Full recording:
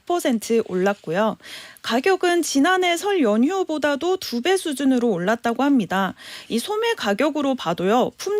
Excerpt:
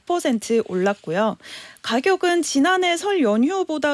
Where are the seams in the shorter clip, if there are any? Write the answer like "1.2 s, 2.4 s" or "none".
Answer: none